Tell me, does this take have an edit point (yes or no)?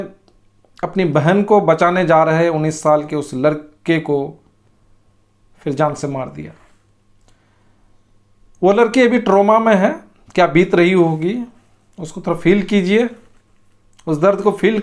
no